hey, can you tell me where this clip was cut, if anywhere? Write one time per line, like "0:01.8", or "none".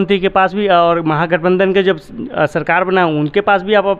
none

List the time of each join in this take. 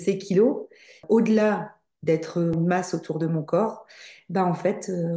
0:01.0
0:02.6

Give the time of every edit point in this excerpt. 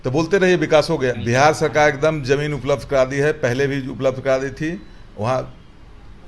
0:01.2

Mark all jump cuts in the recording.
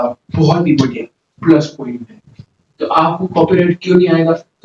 none

